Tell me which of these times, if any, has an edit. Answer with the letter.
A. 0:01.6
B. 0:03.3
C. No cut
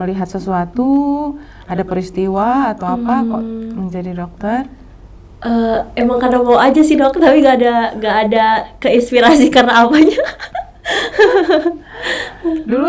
C